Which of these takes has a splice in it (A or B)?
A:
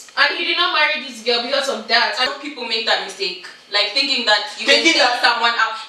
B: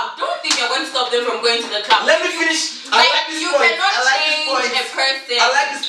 A